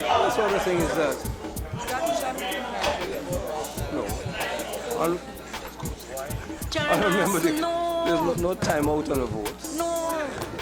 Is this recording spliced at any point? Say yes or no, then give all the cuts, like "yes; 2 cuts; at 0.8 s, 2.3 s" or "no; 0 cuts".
no; 0 cuts